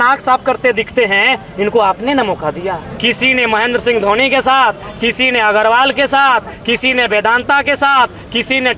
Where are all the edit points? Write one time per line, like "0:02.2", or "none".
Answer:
0:02.8